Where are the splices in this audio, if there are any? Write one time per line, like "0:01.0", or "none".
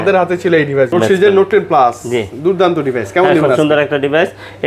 0:00.9

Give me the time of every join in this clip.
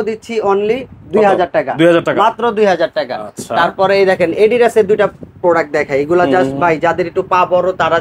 none

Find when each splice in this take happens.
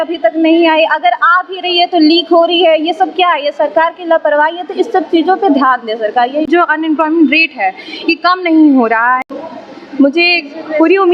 0:06.5
0:09.2

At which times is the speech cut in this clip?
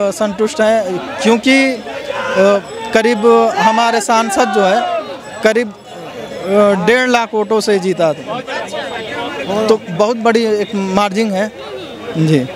none

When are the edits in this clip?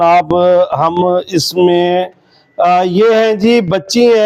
none

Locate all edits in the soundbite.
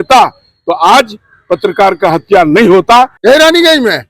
0:03.1

